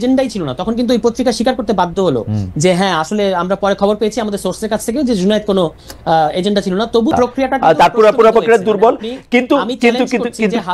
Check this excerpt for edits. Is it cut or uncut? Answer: cut